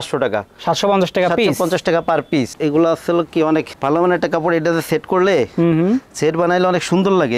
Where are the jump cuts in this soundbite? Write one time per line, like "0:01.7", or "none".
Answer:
0:02.5